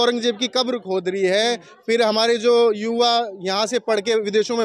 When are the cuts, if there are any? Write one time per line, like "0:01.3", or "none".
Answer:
none

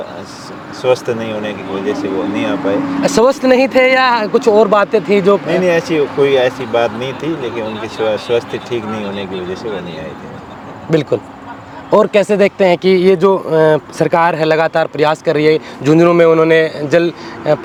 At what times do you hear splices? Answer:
none

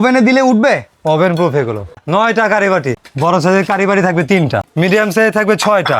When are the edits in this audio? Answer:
0:02.0
0:02.9
0:04.6

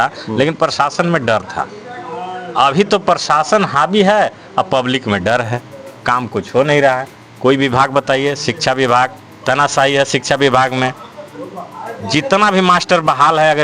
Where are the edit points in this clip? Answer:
none

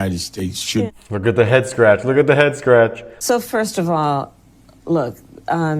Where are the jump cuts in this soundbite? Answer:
0:03.1

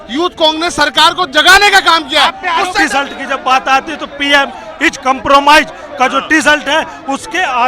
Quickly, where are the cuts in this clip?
0:02.8

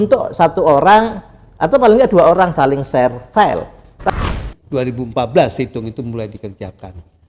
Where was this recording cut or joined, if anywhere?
0:04.1

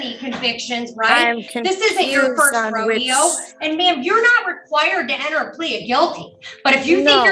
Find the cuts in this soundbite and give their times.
none

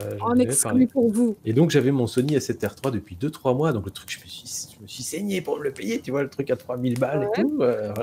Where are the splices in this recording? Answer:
0:01.4

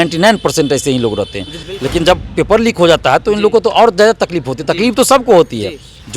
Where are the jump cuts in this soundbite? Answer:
0:01.6

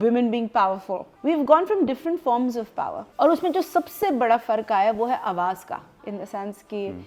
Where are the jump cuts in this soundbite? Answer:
0:01.0
0:03.0
0:05.9

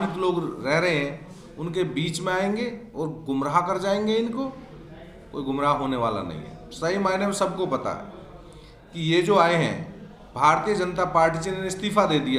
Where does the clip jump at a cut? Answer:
none

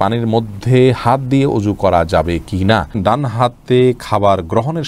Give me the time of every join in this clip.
0:03.0

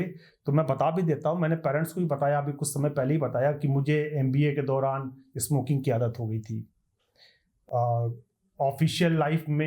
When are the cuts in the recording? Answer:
none

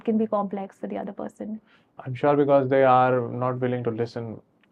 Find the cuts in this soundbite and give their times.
none

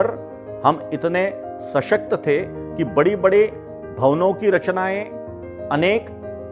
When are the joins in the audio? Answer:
none

